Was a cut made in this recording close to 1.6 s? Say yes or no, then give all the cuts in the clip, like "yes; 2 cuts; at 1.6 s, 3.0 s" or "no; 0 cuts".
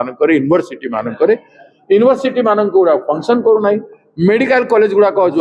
no; 0 cuts